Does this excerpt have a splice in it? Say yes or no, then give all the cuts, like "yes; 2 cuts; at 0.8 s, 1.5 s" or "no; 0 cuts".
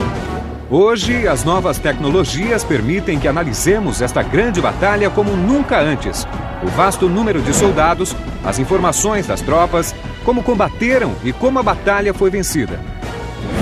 no; 0 cuts